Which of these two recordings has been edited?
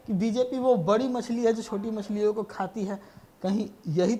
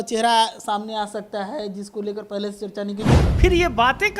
second; 1 cut; at 3.2 s

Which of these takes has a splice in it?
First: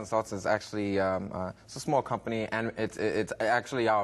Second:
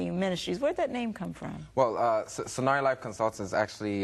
second; 1 cut; at 1.7 s

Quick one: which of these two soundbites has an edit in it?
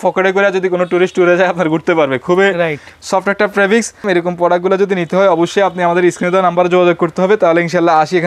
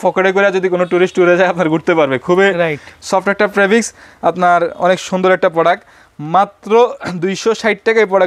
first; 1 cut; at 4.1 s

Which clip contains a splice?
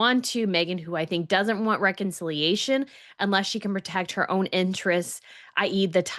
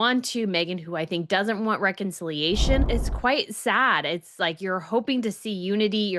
second; 1 cut; at 2.9 s

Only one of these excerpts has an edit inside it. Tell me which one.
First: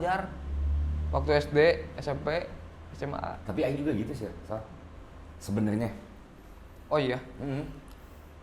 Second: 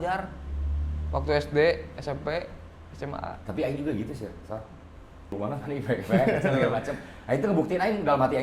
second; 1 cut; at 5.3 s

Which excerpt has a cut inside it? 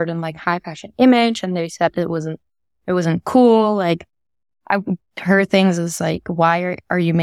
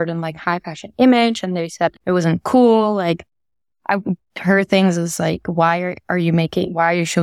second; 1 cut; at 2.0 s

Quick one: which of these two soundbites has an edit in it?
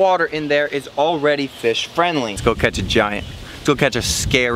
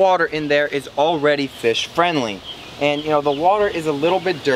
first; 1 cut; at 2.3 s

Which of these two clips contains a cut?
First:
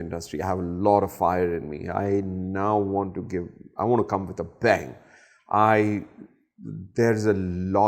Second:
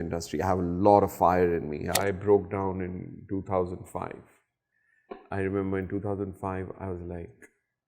second; 1 cut; at 1.9 s

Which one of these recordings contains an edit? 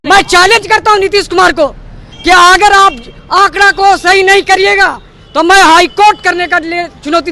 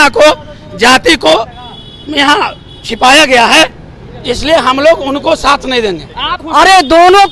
second; 1 cut; at 6.4 s

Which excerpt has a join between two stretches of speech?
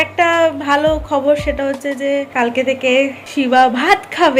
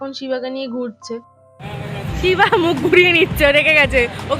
second; 1 cut; at 1.3 s

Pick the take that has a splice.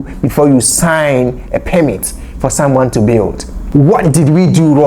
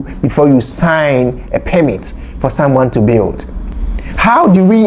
first; 1 cut; at 3.5 s

